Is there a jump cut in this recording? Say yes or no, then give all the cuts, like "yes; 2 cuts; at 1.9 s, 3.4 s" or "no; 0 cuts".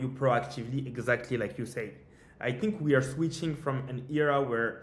no; 0 cuts